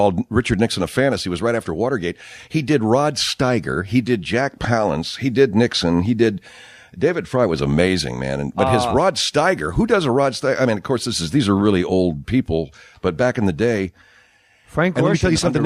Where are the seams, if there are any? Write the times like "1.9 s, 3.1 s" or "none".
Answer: none